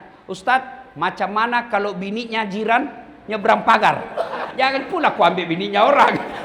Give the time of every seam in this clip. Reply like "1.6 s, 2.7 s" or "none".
4.4 s